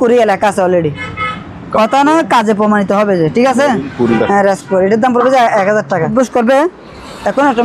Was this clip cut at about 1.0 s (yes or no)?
no